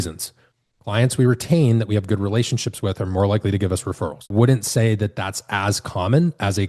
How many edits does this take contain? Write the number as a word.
one